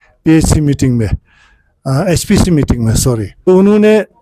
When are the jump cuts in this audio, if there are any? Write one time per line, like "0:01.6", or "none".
0:03.3